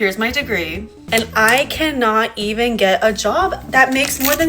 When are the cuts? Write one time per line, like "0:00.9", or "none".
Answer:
0:00.9